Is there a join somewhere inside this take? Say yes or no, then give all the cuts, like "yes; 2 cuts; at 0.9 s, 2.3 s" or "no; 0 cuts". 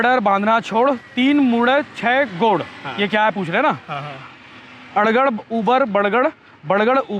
no; 0 cuts